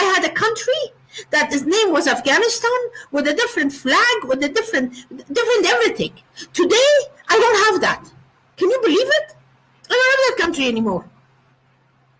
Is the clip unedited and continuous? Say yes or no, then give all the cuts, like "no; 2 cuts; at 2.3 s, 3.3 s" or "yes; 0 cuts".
yes; 0 cuts